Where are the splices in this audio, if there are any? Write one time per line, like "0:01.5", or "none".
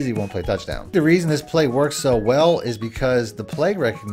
0:00.9